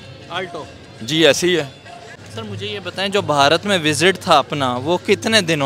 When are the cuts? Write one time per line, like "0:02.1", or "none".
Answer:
0:02.2